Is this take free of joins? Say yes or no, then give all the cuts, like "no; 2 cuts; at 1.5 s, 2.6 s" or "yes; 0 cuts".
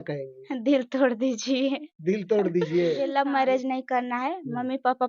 no; 1 cut; at 3.0 s